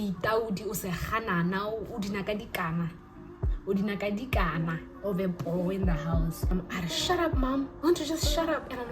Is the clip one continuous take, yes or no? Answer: no